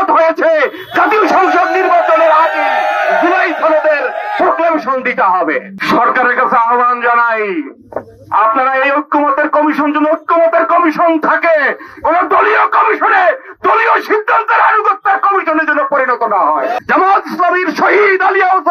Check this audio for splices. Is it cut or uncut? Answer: cut